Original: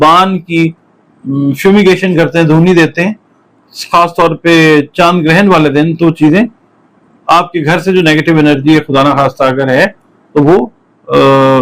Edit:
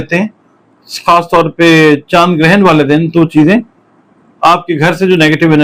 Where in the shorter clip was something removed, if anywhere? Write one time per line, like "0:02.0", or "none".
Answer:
none